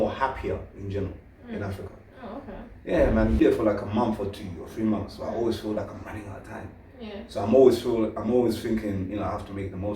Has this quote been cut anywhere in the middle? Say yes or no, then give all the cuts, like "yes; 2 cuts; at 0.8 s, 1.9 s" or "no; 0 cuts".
yes; 1 cut; at 3.4 s